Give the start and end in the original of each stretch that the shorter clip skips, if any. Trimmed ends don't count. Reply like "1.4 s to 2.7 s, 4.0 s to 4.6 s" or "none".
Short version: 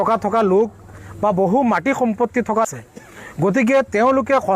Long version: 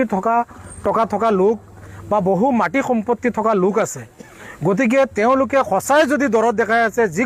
3.5 s to 3.9 s